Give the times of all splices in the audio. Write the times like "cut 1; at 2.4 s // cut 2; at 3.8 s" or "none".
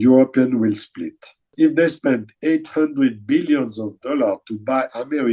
cut 1; at 1.5 s